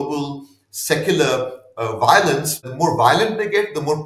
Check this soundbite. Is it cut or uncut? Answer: cut